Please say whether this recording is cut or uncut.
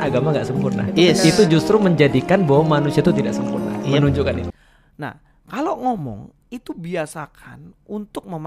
cut